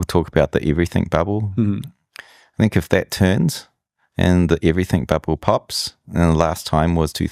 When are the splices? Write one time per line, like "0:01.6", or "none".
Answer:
none